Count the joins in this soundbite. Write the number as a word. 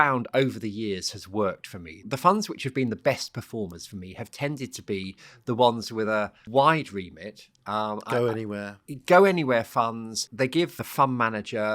three